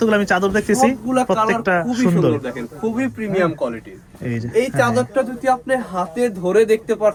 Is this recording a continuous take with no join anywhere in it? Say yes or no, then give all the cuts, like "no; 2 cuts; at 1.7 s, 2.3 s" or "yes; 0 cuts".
yes; 0 cuts